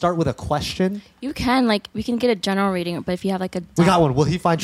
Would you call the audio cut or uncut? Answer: cut